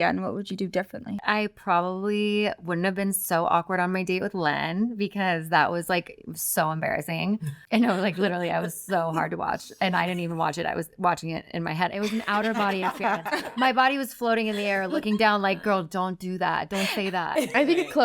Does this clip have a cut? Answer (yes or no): yes